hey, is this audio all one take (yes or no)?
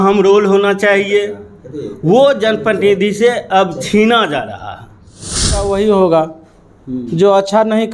no